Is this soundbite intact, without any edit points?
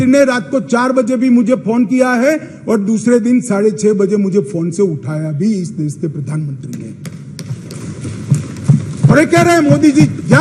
yes; 0 cuts

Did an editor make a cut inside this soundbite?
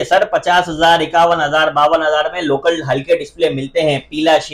no; 0 cuts

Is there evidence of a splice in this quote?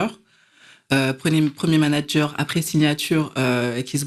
no; 0 cuts

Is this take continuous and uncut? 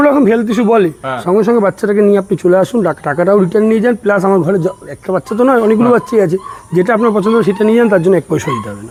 yes; 0 cuts

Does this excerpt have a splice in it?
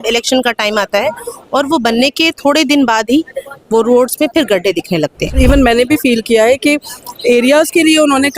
yes; 1 cut; at 5.4 s

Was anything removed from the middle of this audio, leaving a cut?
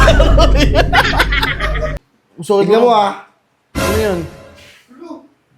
yes; 1 cut; at 2.0 s

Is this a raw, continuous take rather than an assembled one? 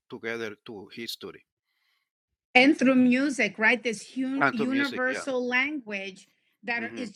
yes; 0 cuts

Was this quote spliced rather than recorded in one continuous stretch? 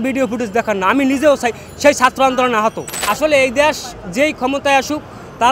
yes; 1 cut; at 2.9 s

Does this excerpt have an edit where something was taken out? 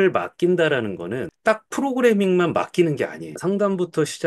yes; 2 cuts; at 1.2 s, 3.3 s

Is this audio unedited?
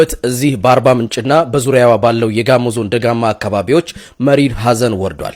yes; 0 cuts

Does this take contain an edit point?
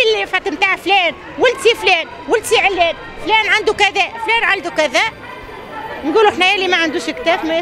no; 0 cuts

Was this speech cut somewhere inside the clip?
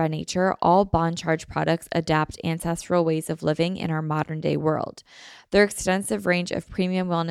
no; 0 cuts

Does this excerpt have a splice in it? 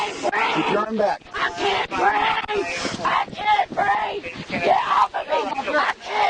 no; 0 cuts

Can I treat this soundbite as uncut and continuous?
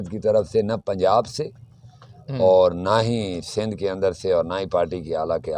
yes; 0 cuts

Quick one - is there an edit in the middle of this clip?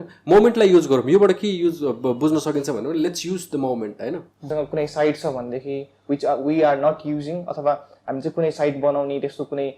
yes; 1 cut; at 4.5 s

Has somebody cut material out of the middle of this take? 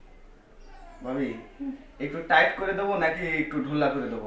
no; 0 cuts

